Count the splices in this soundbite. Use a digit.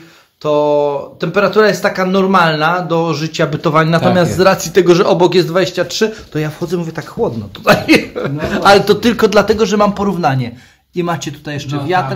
0